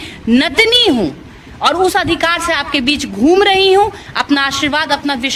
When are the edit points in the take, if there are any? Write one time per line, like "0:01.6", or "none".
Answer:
none